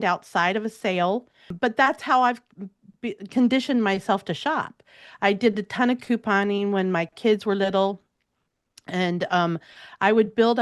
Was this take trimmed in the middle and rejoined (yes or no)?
yes